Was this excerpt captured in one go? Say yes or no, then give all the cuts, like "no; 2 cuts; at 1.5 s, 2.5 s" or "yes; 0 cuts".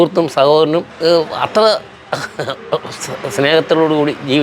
no; 1 cut; at 0.9 s